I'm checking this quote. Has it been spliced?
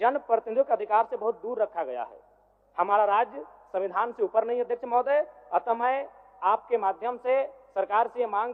no; 0 cuts

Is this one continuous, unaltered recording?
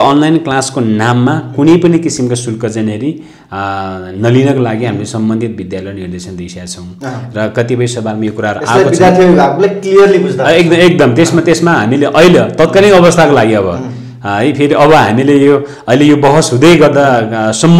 yes; 0 cuts

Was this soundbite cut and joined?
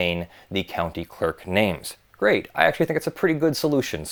no; 0 cuts

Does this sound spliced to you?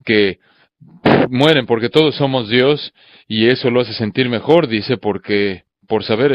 yes; 1 cut; at 3.5 s

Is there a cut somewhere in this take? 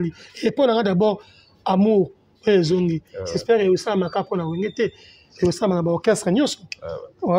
no; 0 cuts

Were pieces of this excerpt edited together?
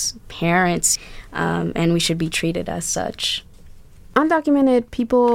yes; 2 cuts; at 0.9 s, 4.0 s

